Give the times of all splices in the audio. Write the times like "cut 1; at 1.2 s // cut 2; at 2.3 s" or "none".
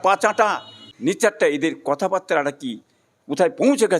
cut 1; at 1.1 s

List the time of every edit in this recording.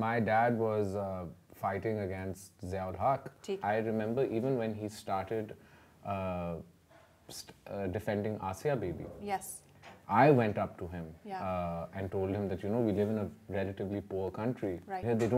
cut 1; at 3.6 s

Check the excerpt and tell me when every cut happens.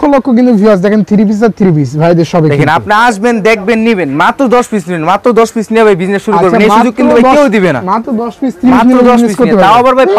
none

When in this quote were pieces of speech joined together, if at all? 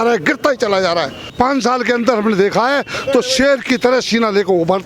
cut 1; at 1.3 s

